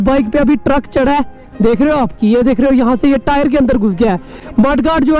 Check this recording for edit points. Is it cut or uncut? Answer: cut